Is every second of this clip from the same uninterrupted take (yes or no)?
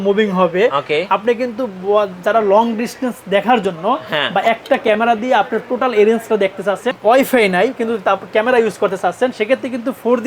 no